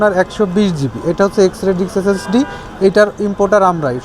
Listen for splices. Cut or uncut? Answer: uncut